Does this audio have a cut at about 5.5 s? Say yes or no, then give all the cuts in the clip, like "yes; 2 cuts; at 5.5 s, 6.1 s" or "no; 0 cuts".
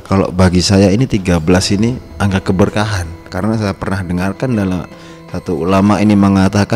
no; 0 cuts